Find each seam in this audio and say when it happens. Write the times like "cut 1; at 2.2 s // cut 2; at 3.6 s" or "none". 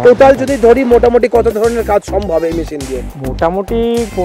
none

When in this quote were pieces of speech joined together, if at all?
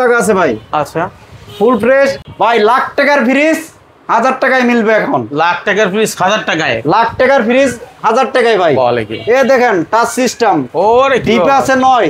cut 1; at 2.2 s

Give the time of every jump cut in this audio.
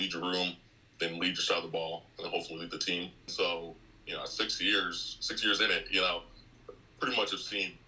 cut 1; at 3.3 s

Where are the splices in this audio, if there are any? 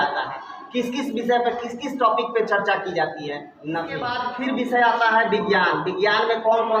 cut 1; at 4.2 s

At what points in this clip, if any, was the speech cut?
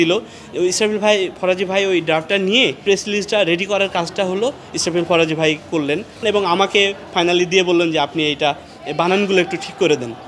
cut 1; at 2.8 s // cut 2; at 6.2 s

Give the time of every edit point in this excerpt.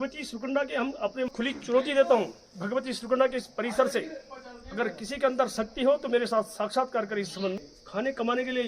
cut 1; at 1.3 s // cut 2; at 7.6 s

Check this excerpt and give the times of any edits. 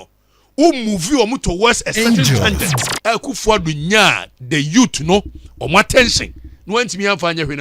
cut 1; at 2.9 s

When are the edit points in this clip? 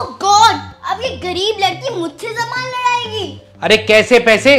cut 1; at 3.4 s

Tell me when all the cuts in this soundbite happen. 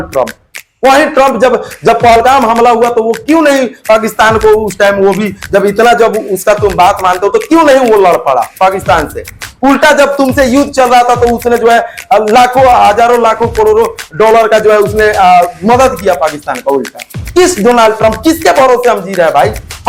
none

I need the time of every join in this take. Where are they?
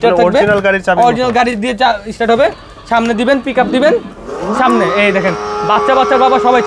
none

